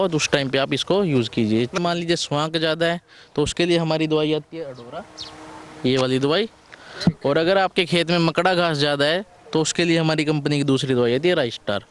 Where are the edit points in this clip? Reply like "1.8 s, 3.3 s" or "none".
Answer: 1.7 s